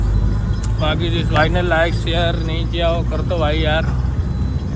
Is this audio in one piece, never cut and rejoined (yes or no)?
yes